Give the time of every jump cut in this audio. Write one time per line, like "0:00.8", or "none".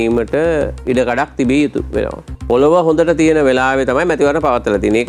0:02.3